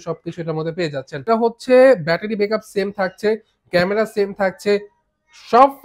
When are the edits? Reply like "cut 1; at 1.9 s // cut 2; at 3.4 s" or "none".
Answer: cut 1; at 1.2 s